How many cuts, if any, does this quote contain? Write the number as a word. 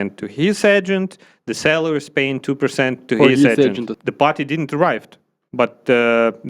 one